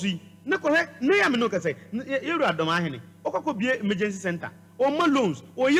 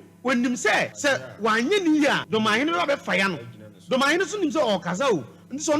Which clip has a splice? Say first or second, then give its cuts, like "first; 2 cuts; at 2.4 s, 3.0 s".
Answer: second; 2 cuts; at 0.9 s, 2.2 s